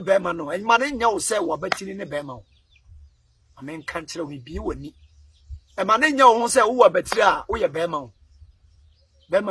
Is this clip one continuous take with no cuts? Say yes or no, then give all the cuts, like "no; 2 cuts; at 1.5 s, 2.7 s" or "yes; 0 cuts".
yes; 0 cuts